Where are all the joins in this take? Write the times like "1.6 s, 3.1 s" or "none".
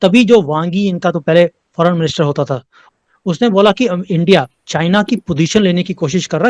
none